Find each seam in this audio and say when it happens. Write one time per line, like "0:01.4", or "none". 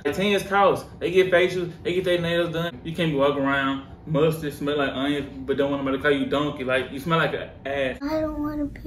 0:02.7